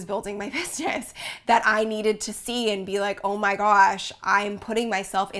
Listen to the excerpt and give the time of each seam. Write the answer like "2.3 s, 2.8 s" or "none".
none